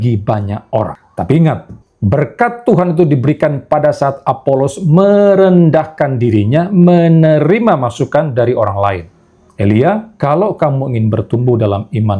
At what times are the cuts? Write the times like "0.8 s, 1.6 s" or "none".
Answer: 1.0 s